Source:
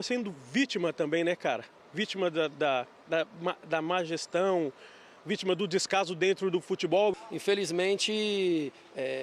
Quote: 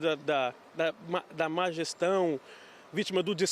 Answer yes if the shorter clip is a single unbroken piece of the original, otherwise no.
yes